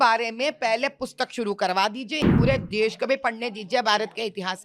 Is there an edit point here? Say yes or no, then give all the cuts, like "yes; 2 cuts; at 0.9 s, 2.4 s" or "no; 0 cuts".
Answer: yes; 1 cut; at 2.3 s